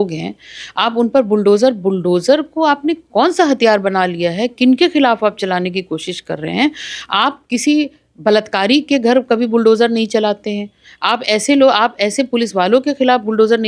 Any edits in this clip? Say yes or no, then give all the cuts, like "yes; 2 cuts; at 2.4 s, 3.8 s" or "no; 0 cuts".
no; 0 cuts